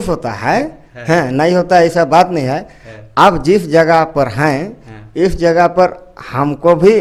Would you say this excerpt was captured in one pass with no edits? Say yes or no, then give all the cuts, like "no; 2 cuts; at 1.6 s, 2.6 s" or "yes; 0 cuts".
yes; 0 cuts